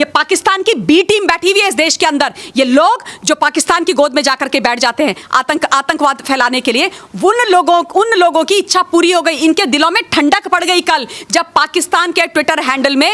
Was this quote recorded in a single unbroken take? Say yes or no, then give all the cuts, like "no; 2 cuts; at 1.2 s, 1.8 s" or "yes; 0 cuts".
yes; 0 cuts